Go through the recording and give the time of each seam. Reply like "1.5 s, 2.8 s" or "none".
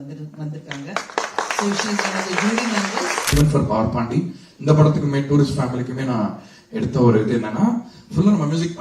3.3 s